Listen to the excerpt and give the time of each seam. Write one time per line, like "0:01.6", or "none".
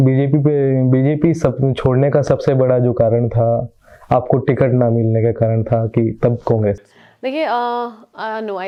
none